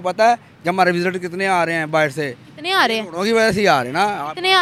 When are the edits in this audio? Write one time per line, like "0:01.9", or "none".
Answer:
none